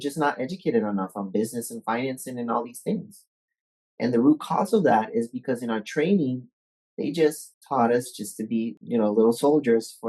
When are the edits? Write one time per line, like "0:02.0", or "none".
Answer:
0:07.5
0:08.8